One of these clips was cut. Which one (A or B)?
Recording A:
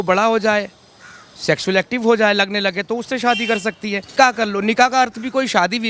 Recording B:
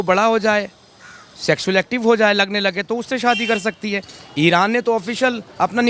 A